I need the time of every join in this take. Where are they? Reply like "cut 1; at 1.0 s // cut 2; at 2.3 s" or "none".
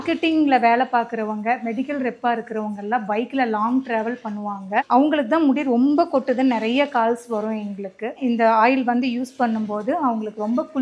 cut 1; at 4.9 s // cut 2; at 8.2 s